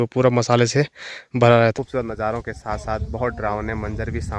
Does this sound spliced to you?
yes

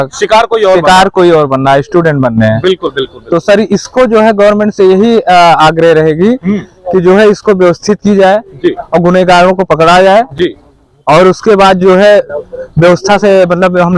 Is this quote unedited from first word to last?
yes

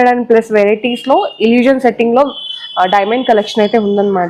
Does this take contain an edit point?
no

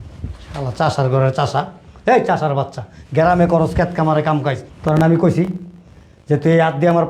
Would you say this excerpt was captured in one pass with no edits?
no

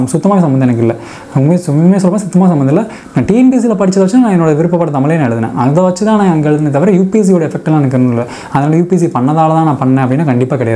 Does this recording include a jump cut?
no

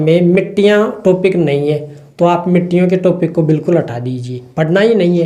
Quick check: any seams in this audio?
no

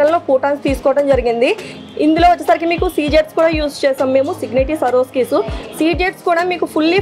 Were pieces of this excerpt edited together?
no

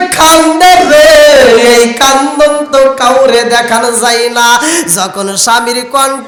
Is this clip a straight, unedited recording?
yes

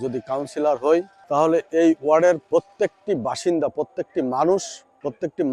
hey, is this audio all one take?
yes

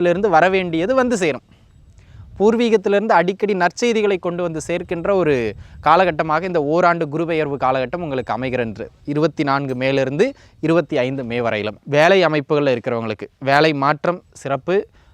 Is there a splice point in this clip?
yes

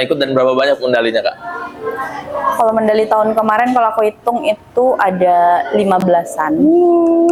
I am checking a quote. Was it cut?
no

